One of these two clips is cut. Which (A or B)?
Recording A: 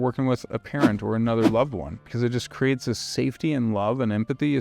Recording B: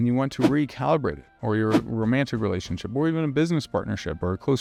A